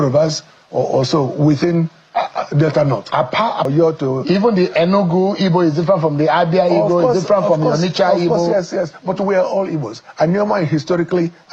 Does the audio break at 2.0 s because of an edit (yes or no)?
no